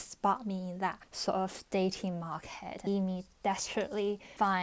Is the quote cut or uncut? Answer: cut